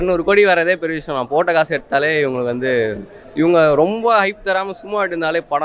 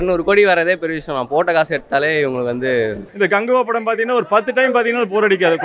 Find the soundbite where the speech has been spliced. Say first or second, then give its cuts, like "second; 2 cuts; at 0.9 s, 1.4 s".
second; 1 cut; at 3.0 s